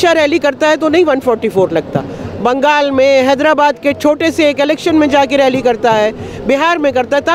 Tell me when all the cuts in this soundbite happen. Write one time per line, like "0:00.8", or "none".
none